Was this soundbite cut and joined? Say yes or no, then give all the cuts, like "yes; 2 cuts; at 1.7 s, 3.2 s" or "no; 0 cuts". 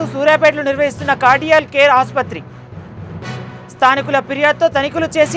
no; 0 cuts